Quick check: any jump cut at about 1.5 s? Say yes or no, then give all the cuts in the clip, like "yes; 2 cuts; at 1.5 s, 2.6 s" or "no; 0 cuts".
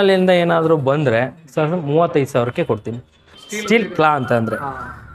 no; 1 cut; at 3.3 s